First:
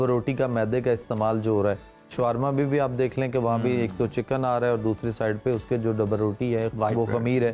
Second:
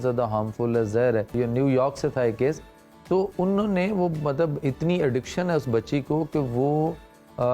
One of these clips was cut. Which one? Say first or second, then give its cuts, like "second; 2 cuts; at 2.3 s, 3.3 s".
second; 1 cut; at 1.3 s